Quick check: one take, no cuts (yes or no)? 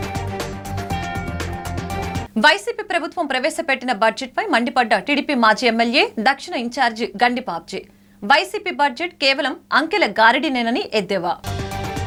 yes